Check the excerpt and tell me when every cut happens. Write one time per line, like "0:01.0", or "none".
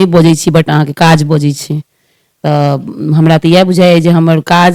none

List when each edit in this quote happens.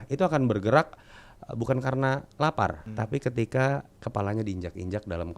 0:02.9
0:03.9

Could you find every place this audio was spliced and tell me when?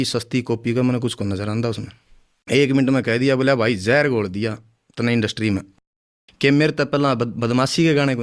none

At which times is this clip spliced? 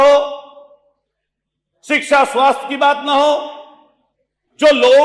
none

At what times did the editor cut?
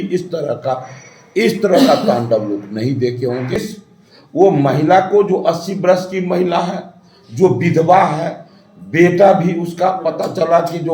0:03.6

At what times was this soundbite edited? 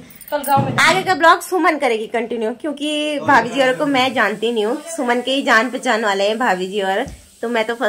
none

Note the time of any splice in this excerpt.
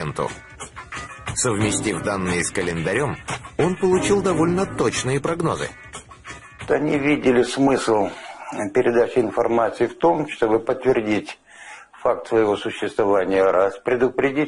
0:03.5

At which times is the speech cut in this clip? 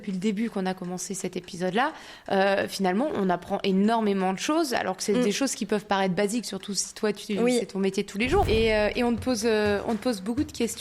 0:08.4

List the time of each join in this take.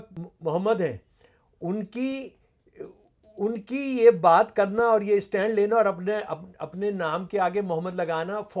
none

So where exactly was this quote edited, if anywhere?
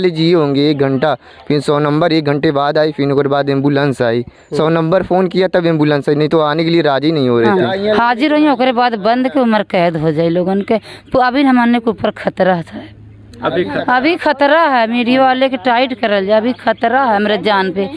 0:07.5

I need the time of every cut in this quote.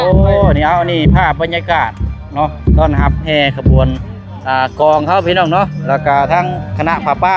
none

